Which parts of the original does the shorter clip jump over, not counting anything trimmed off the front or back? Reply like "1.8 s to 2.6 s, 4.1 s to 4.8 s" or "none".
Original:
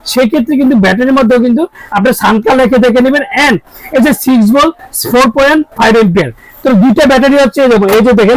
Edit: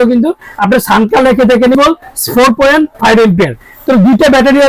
3.1 s to 4.5 s